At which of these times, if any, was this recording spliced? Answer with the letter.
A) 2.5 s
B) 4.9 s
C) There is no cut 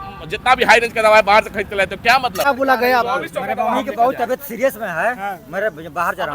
A